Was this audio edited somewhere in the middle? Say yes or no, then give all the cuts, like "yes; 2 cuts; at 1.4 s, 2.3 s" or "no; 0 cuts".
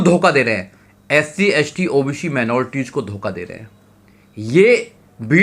no; 0 cuts